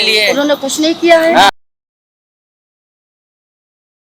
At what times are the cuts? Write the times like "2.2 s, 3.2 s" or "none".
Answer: none